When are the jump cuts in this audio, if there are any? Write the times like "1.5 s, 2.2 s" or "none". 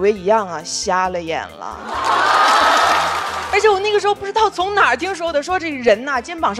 3.2 s